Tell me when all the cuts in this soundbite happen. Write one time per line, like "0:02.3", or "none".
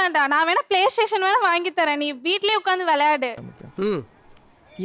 0:03.4